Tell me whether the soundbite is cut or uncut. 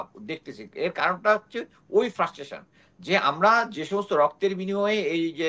uncut